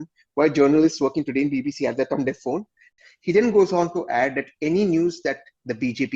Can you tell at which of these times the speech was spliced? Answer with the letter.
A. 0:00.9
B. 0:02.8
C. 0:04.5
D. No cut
B